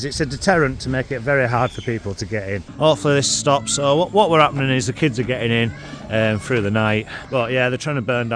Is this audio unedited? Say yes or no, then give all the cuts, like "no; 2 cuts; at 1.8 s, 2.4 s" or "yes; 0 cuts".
no; 2 cuts; at 2.6 s, 7.2 s